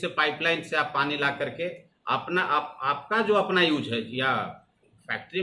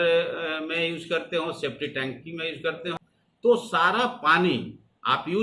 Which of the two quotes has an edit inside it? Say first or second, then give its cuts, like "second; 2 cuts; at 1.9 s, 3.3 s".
second; 1 cut; at 2.9 s